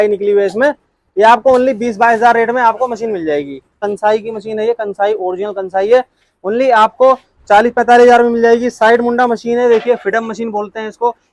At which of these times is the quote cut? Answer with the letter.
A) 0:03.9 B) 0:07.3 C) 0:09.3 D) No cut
A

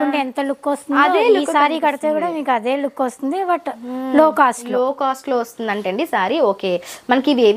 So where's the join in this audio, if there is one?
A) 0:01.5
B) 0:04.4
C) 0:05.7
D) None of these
D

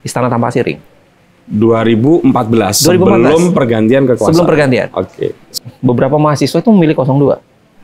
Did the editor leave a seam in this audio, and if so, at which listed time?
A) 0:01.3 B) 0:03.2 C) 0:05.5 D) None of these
C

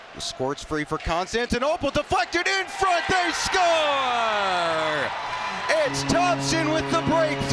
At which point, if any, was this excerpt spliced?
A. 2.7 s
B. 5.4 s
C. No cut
C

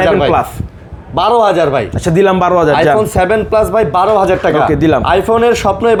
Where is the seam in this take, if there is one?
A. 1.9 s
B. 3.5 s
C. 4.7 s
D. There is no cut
D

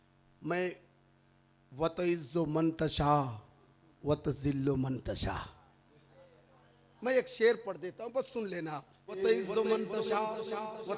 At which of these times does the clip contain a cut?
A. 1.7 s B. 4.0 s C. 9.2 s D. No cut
C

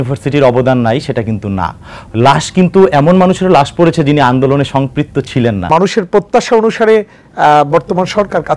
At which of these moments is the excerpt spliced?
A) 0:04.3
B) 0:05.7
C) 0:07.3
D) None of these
B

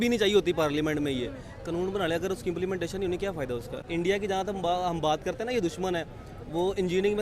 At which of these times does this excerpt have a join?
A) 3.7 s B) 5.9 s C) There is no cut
A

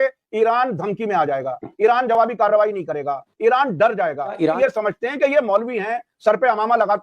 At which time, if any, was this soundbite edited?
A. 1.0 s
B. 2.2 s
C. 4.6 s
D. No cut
C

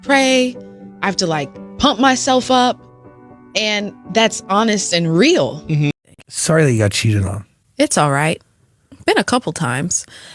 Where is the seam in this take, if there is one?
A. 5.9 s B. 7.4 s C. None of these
A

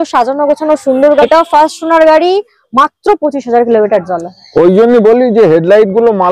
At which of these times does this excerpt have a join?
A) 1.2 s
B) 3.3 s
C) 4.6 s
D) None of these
A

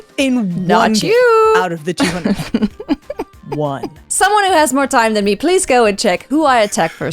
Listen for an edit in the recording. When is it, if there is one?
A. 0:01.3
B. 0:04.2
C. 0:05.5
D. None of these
B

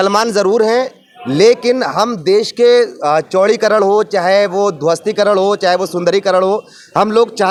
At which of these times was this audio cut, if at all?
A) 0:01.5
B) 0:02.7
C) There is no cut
C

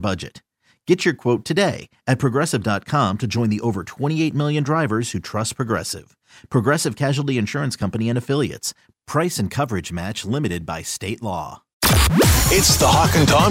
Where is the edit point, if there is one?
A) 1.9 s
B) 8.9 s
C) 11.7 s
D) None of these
C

